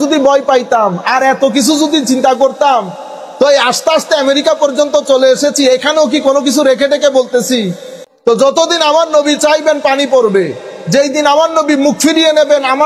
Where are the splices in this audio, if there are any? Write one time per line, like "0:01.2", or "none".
0:08.0